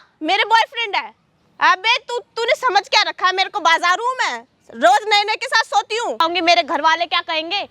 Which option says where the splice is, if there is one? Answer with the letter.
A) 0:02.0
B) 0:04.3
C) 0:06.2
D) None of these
C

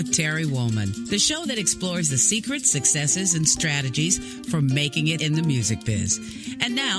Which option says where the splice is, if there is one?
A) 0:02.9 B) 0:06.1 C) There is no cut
C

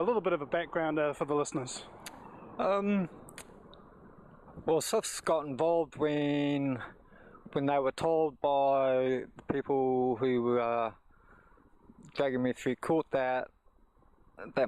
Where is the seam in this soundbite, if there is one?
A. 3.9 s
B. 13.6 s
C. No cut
A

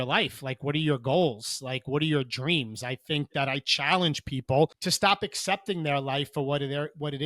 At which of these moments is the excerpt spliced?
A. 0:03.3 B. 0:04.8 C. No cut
B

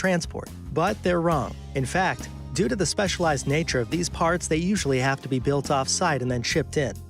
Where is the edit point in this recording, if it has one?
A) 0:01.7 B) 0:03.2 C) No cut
A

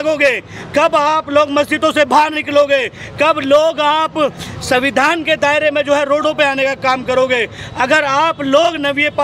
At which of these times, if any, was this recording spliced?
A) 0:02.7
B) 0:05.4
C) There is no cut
C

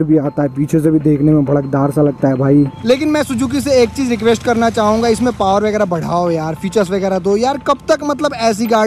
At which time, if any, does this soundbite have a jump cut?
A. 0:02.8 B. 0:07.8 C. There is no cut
A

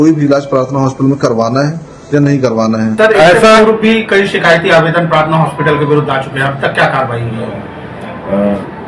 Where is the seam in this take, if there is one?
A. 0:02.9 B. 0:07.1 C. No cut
A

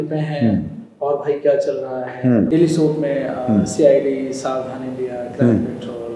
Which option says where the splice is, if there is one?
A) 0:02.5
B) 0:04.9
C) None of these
A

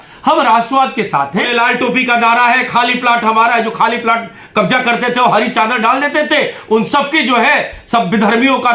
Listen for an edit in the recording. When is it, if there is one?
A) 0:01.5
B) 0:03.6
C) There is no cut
A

